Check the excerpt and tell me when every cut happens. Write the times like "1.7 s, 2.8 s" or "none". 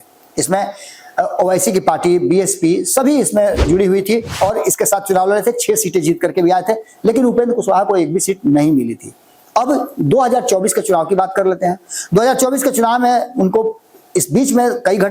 none

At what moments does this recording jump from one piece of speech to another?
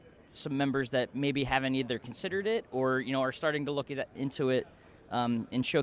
none

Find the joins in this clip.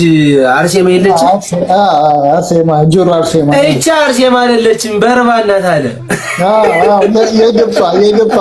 none

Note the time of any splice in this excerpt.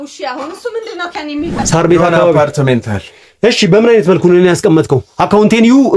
1.6 s

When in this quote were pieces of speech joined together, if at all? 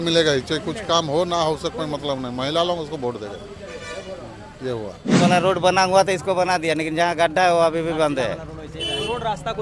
5.2 s

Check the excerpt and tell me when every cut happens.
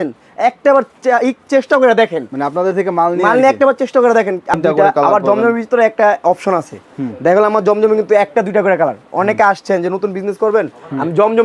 4.6 s

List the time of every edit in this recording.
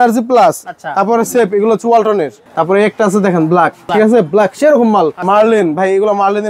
2.4 s, 3.8 s, 5.2 s

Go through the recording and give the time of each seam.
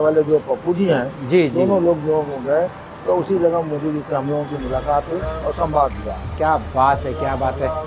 none

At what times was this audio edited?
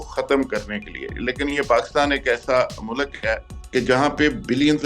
3.5 s

